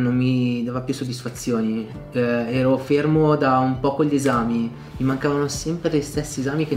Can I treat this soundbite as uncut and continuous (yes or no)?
yes